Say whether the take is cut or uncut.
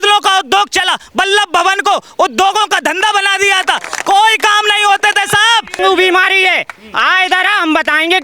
cut